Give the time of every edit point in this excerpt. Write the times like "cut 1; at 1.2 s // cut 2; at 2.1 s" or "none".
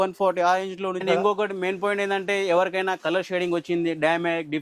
cut 1; at 1.0 s